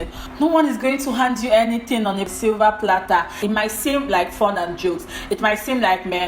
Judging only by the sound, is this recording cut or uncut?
cut